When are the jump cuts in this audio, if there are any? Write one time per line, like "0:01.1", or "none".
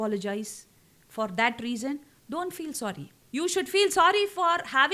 0:03.1